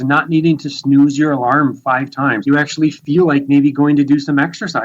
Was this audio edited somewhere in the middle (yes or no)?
yes